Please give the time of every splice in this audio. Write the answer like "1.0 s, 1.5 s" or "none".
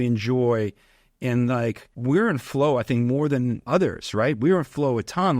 1.9 s, 3.6 s